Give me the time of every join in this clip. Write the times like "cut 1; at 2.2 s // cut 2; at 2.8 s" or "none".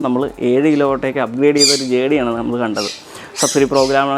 none